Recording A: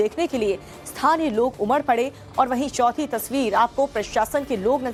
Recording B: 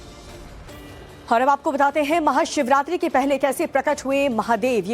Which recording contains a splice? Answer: B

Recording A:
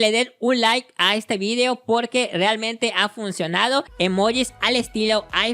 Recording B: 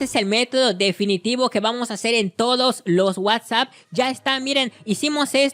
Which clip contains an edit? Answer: A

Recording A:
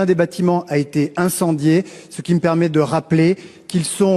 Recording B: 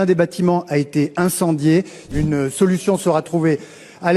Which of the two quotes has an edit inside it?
B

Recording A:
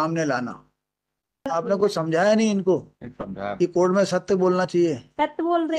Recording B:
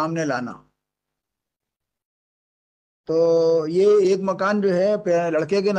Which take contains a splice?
A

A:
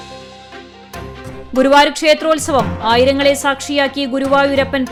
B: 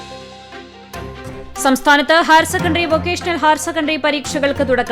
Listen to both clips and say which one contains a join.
B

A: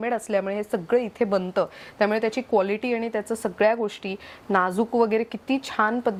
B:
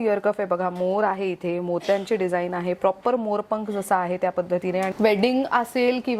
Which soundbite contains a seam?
B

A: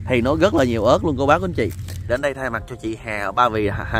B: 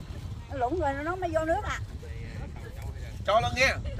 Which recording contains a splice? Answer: A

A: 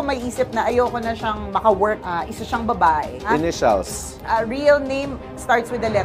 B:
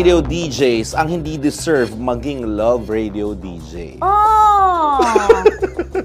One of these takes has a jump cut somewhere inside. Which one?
A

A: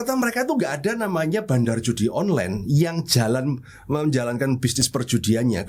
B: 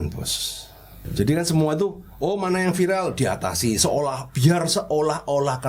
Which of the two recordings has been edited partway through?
B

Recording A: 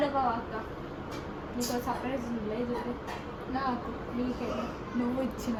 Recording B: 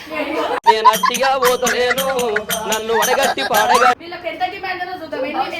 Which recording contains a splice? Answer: B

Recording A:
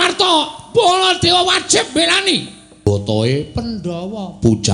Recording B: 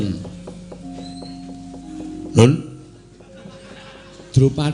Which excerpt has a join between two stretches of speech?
A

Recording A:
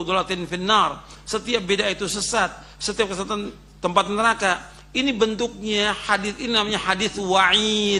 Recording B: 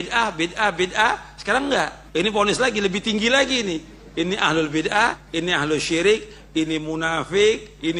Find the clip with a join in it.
B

